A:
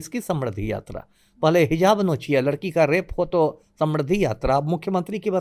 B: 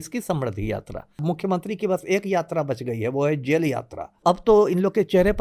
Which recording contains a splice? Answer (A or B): B